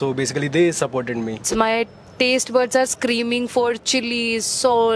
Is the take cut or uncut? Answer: cut